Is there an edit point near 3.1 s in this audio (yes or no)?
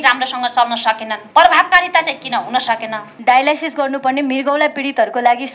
yes